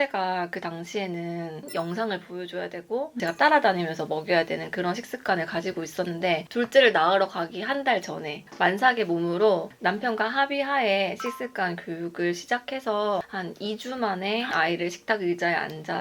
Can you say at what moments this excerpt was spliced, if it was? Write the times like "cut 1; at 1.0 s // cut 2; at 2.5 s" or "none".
cut 1; at 1.7 s // cut 2; at 6.5 s // cut 3; at 14.5 s